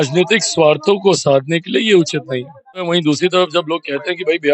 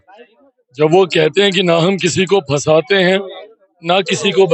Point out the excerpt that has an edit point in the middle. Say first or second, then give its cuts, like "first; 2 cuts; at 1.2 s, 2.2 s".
first; 1 cut; at 3.0 s